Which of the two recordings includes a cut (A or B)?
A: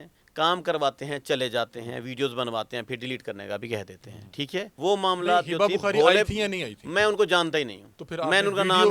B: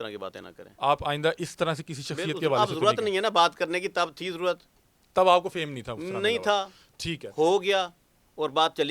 A